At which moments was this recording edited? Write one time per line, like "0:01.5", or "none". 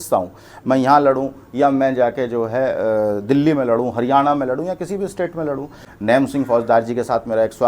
0:05.8